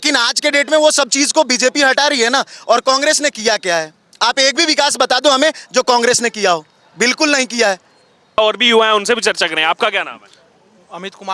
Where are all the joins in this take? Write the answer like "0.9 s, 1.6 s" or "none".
none